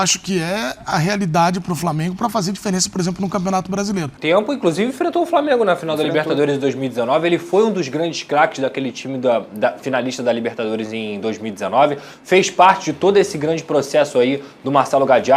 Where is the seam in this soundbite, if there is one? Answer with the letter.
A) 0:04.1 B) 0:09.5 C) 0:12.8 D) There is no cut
A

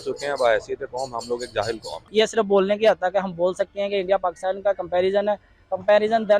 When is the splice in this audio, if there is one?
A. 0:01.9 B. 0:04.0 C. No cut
A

